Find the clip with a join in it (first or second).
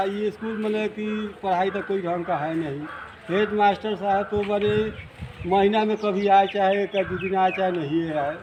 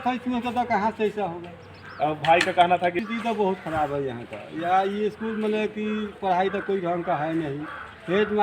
second